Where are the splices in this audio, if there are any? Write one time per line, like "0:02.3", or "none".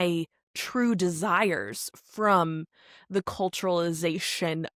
none